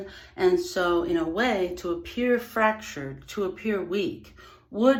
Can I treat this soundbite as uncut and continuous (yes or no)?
yes